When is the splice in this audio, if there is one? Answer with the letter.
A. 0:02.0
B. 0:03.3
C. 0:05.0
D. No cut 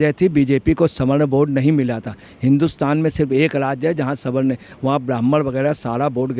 D